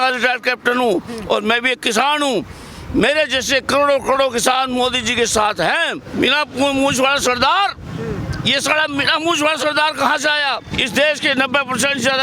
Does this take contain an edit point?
yes; 2 cuts; at 6.0 s, 10.7 s

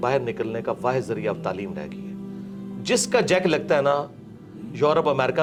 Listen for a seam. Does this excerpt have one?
no; 0 cuts

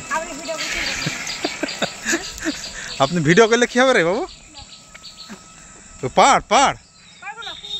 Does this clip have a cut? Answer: no; 0 cuts

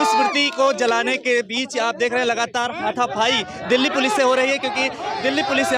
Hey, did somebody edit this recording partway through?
no; 0 cuts

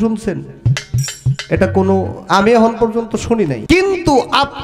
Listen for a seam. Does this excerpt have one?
yes; 1 cut; at 3.6 s

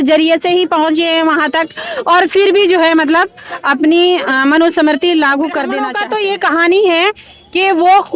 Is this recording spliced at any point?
yes; 1 cut; at 5.9 s

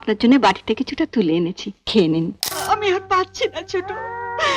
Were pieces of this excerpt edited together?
yes; 1 cut; at 2.5 s

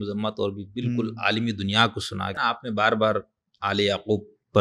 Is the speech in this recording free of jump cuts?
no; 1 cut; at 2.3 s

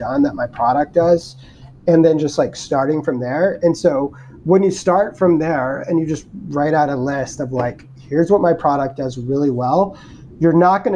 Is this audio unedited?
yes; 0 cuts

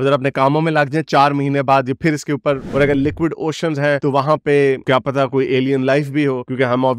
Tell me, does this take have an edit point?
yes; 1 cut; at 2.7 s

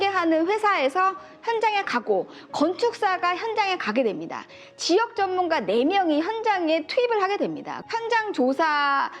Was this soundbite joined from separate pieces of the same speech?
yes; 1 cut; at 7.7 s

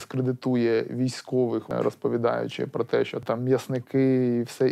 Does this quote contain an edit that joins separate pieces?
yes; 2 cuts; at 1.7 s, 3.2 s

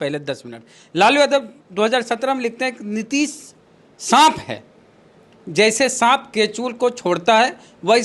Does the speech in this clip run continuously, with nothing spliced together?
yes; 0 cuts

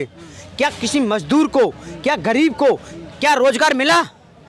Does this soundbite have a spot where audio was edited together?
no; 0 cuts

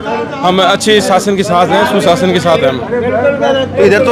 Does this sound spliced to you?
no; 0 cuts

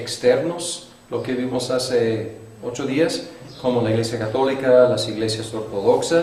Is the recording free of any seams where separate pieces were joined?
no; 1 cut; at 1.0 s

